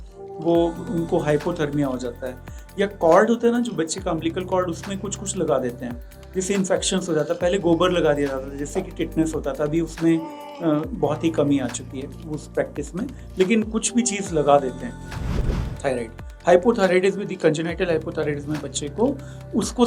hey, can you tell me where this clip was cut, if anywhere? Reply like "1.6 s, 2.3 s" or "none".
15.4 s